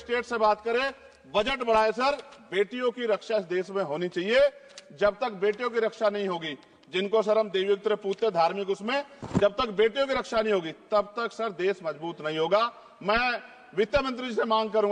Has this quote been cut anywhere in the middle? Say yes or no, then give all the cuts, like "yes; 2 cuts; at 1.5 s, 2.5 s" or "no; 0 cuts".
no; 0 cuts